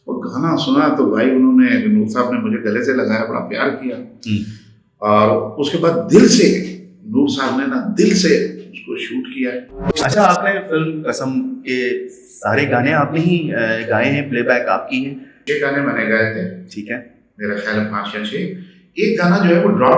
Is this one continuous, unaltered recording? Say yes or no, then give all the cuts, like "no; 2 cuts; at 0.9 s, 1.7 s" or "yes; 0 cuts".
no; 2 cuts; at 10.0 s, 15.4 s